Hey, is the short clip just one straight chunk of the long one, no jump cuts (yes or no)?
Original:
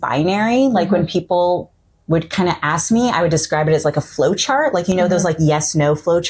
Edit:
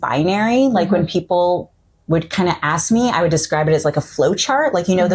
yes